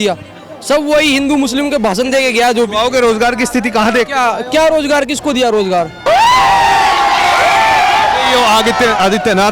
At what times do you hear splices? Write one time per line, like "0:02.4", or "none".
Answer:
0:06.0